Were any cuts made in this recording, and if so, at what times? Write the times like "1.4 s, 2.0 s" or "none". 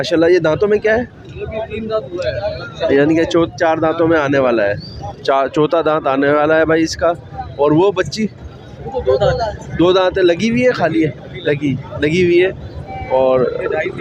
none